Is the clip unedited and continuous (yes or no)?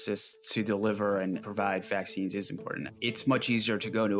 no